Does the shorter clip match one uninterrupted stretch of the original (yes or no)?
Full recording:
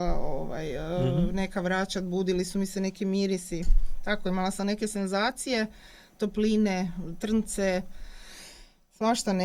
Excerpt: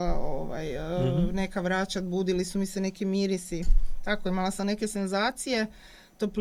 yes